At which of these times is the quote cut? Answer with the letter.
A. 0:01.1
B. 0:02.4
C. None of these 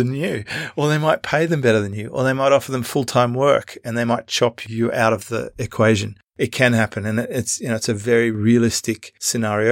C